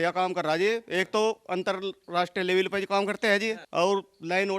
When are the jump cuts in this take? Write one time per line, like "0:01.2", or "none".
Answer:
0:03.6